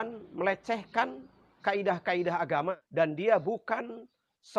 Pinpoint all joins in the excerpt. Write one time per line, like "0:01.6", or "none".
0:02.8